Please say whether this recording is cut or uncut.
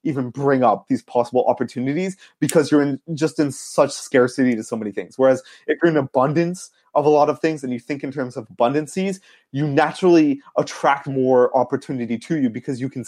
uncut